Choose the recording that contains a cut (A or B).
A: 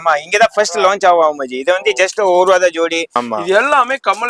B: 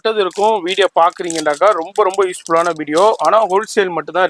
A